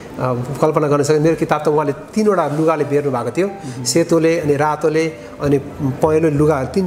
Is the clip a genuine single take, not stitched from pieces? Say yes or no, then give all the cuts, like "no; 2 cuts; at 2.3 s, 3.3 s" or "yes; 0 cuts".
yes; 0 cuts